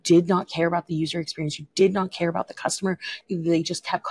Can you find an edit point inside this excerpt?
yes; 1 cut; at 3.1 s

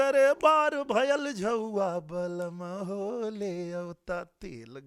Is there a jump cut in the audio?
no; 0 cuts

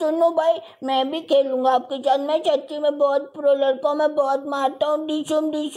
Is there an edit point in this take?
no; 0 cuts

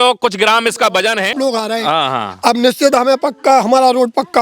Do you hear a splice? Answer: yes; 1 cut; at 1.3 s

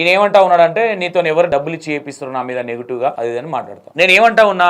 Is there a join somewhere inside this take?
yes; 2 cuts; at 1.5 s, 3.4 s

